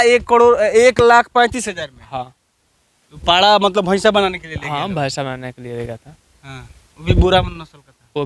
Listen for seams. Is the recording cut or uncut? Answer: uncut